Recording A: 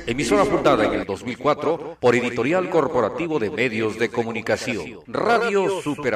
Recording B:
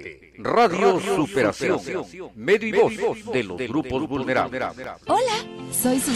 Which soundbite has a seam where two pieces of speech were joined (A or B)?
B